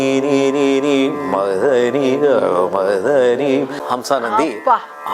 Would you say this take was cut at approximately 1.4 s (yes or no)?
no